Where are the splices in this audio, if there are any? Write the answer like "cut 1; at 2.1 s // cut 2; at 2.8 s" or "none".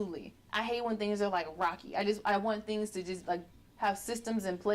none